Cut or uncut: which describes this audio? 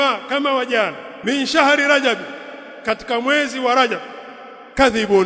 cut